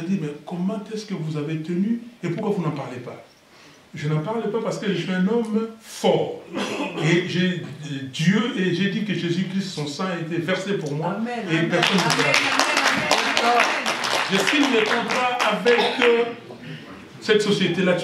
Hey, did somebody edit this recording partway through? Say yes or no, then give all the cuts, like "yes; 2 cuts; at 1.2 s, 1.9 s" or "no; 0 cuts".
yes; 1 cut; at 4.8 s